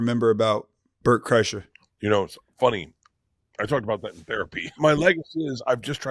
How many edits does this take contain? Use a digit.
1